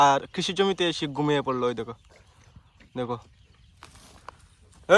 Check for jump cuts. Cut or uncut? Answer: uncut